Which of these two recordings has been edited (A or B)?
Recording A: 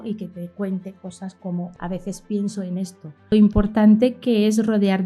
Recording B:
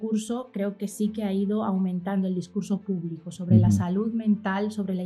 A